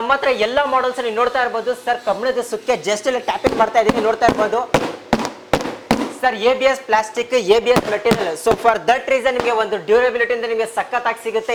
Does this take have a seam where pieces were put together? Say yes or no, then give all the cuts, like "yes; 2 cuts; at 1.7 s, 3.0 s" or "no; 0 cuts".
no; 0 cuts